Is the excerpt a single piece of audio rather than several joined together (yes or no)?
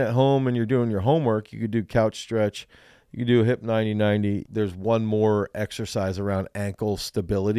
no